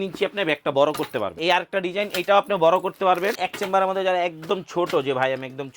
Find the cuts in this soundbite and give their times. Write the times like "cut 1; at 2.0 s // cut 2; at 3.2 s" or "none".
cut 1; at 1.4 s // cut 2; at 3.4 s